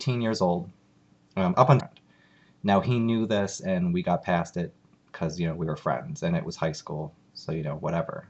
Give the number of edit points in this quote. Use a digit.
0